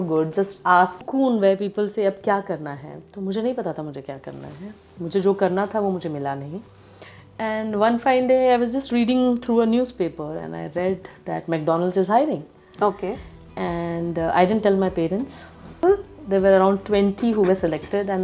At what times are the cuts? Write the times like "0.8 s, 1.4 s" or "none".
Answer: 1.0 s, 15.7 s